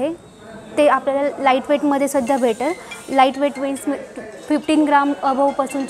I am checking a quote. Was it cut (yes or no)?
no